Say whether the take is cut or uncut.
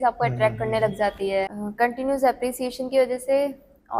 cut